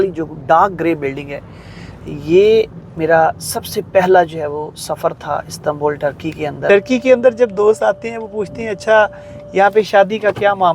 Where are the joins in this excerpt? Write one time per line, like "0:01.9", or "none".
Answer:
0:06.7